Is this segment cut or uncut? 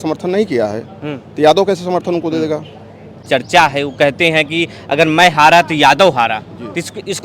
cut